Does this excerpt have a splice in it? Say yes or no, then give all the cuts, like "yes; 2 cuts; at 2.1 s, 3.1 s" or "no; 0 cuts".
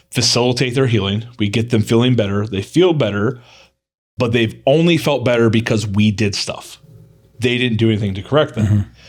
no; 0 cuts